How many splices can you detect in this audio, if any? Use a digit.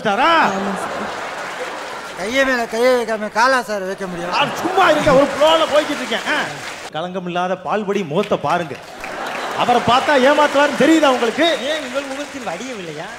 1